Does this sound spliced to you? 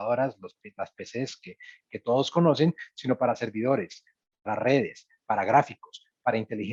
no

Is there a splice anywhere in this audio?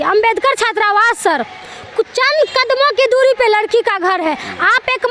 no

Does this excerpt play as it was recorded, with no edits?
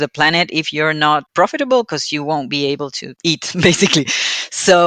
no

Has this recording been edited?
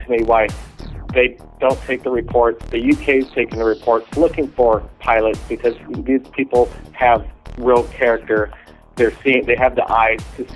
yes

